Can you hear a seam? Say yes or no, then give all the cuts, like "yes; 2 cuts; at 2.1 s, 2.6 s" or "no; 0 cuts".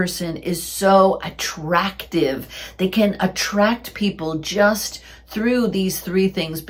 no; 0 cuts